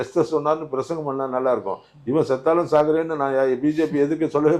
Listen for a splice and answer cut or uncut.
uncut